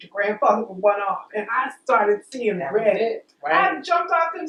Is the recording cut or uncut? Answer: uncut